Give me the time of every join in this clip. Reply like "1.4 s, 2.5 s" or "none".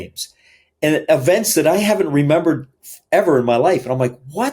none